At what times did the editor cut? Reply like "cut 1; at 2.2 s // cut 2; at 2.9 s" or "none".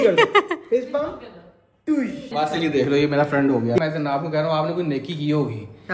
cut 1; at 2.4 s // cut 2; at 3.8 s

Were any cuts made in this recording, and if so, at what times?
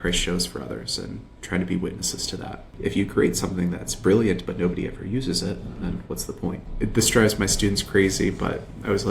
cut 1; at 2.7 s // cut 2; at 6.6 s

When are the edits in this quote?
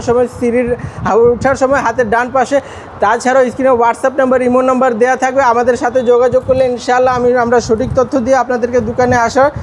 none

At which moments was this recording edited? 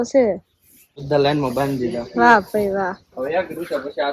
cut 1; at 1.0 s

